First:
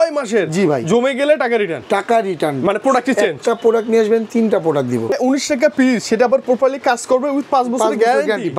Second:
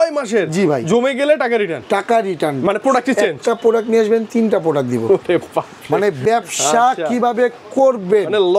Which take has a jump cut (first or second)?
first